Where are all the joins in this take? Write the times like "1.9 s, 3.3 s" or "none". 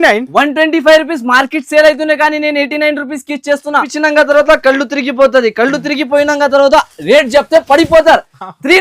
3.9 s